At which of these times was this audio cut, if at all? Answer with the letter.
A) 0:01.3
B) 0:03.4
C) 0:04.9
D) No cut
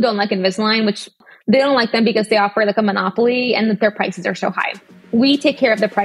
A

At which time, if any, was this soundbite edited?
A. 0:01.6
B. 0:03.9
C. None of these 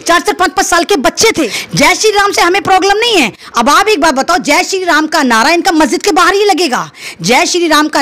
A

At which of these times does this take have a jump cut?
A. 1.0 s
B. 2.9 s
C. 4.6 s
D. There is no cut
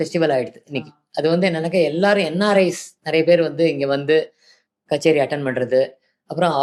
D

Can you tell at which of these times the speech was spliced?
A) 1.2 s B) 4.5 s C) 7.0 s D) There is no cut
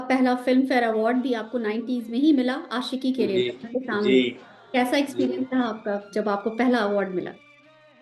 D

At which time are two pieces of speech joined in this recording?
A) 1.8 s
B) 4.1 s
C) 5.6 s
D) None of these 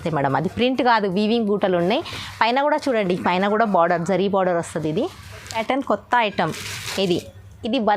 C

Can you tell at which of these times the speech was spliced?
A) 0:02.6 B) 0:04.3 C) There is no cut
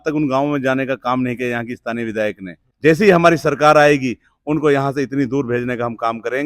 A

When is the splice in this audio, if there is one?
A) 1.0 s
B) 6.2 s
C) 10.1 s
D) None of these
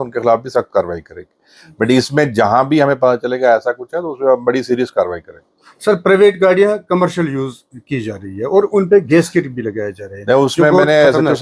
D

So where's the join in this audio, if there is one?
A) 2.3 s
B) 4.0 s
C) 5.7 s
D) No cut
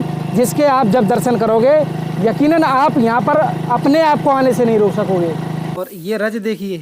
C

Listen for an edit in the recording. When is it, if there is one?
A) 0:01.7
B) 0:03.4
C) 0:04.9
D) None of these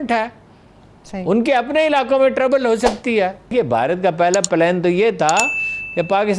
B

